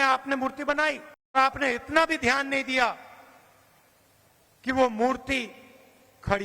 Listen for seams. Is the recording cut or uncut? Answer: cut